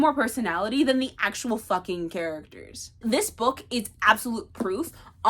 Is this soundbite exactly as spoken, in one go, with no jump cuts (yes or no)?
no